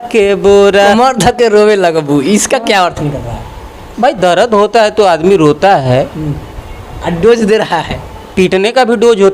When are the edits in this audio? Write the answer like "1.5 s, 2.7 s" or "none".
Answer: 0.9 s